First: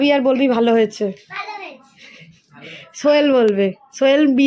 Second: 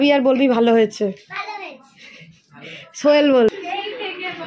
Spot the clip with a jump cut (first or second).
second